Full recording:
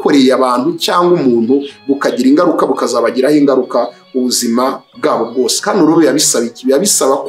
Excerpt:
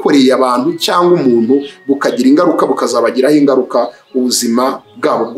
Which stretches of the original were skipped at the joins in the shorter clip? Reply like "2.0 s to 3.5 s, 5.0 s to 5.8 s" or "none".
none